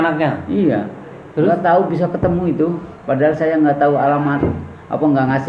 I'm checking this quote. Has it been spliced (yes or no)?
no